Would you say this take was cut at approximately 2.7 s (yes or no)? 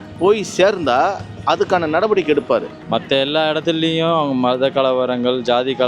yes